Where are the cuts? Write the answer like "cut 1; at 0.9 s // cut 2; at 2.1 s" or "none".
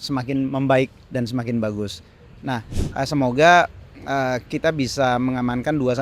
cut 1; at 2.8 s